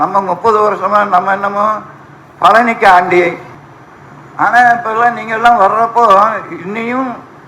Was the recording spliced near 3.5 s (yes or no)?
yes